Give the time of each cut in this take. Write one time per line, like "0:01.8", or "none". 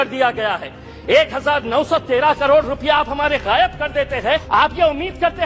0:04.4